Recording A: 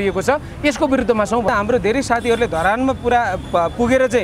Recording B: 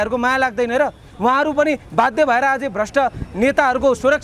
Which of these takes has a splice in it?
A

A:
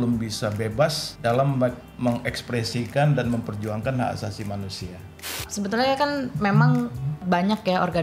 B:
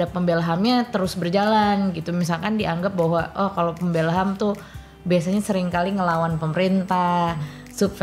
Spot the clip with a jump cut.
A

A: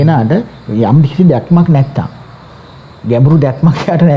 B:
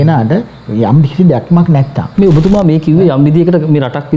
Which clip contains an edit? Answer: B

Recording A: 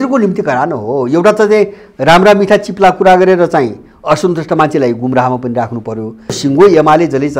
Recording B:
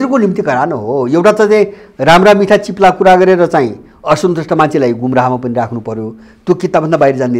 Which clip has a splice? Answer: A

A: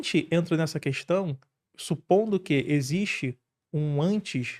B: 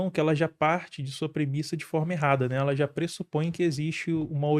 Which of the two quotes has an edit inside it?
A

